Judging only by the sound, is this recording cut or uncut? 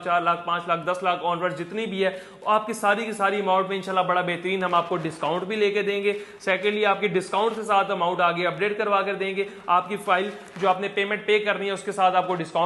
uncut